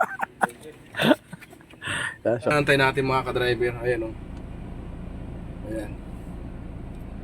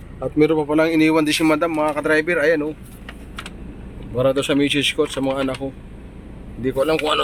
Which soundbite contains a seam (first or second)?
first